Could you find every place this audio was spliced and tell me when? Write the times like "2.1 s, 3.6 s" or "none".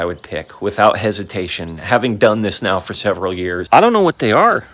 3.6 s